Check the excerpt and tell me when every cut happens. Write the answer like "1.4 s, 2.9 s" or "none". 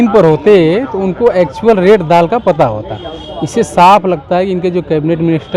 none